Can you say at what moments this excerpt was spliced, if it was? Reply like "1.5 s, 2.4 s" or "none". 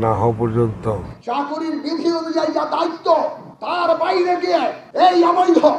1.1 s